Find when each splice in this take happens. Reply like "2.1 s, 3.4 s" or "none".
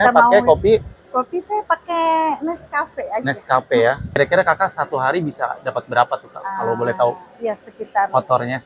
4.2 s